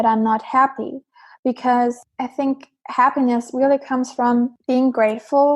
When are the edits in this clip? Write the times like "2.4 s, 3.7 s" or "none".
2.1 s, 4.6 s